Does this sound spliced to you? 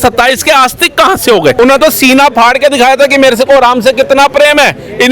yes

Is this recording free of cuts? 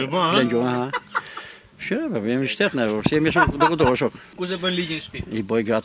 no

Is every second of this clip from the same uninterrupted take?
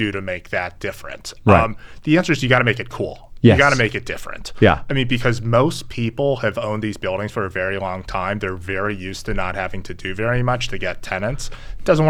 yes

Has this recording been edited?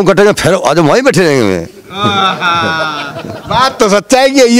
no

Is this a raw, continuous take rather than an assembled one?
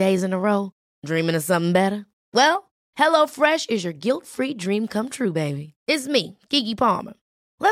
yes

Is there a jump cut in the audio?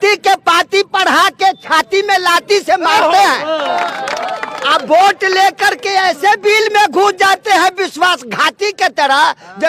yes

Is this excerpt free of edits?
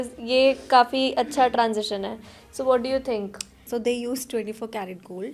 no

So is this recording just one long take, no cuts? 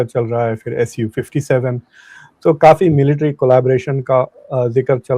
yes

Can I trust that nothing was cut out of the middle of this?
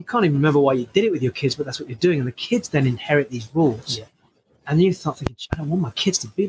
yes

